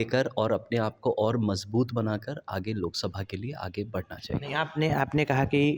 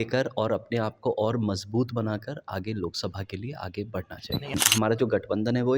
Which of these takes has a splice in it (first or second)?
second